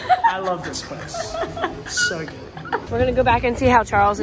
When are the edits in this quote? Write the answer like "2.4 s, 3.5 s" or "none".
2.9 s

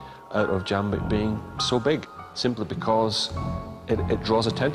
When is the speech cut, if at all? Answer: 2.2 s

